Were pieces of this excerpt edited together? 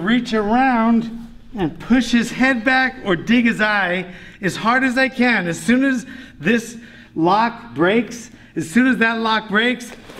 no; 0 cuts

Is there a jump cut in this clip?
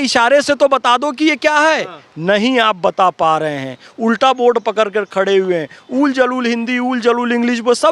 no; 0 cuts

